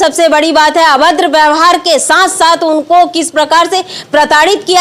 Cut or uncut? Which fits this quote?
uncut